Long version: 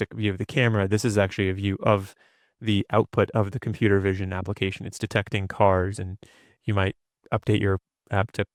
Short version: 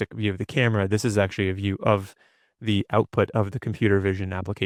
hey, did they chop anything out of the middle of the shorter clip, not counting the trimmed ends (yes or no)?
no